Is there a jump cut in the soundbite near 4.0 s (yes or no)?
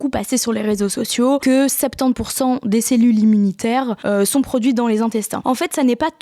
yes